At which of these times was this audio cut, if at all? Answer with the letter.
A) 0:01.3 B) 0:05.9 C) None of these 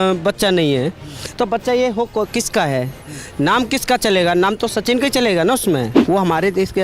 B